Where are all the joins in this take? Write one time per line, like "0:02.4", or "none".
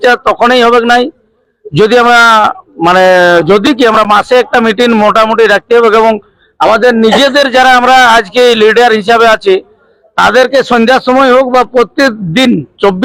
none